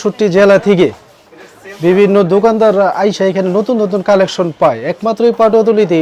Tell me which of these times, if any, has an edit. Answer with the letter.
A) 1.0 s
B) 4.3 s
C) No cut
C